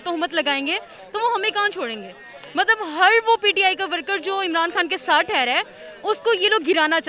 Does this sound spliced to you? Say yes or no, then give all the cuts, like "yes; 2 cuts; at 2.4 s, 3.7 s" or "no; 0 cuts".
no; 0 cuts